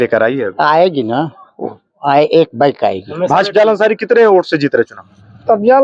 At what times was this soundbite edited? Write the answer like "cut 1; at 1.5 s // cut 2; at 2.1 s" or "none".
cut 1; at 3.5 s